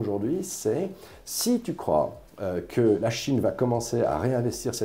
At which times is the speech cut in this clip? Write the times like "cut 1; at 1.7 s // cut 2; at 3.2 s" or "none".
cut 1; at 3.0 s